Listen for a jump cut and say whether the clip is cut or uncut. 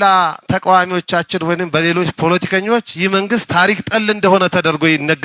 uncut